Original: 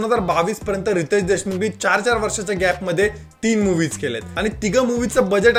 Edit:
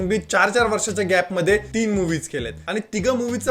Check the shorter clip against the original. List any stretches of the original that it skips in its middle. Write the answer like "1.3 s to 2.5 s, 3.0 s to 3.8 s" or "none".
3.2 s to 3.4 s